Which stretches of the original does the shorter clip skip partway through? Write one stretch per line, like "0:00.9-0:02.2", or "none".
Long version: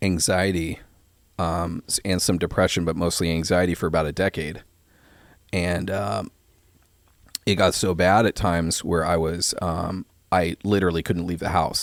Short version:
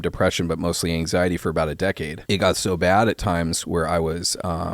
0:04.5-0:07.3